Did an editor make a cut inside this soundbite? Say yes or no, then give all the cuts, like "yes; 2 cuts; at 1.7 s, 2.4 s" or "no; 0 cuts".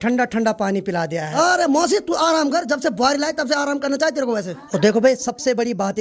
yes; 2 cuts; at 1.3 s, 4.7 s